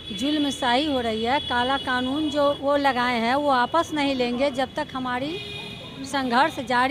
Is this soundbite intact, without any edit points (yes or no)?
no